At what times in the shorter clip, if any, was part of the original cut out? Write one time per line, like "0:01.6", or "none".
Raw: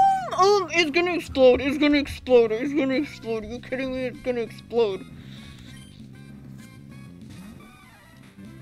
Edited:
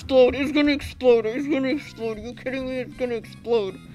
none